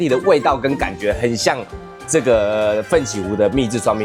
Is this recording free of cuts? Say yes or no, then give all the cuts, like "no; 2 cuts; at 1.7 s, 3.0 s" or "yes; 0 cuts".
yes; 0 cuts